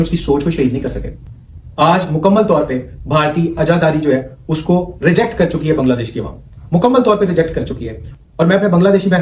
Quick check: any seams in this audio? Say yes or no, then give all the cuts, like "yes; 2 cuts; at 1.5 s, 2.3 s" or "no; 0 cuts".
no; 0 cuts